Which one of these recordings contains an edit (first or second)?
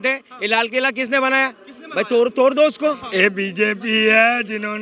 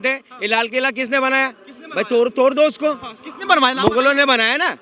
first